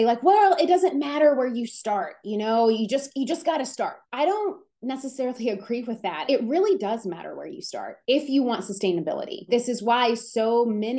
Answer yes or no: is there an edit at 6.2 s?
yes